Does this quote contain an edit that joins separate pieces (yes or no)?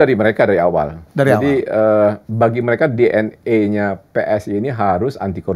no